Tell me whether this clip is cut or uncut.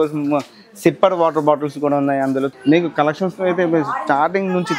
cut